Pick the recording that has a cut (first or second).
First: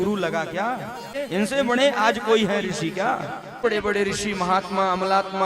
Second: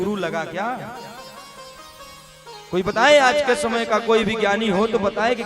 first